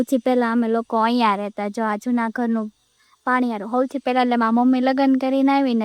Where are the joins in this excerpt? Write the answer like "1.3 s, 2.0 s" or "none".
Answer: none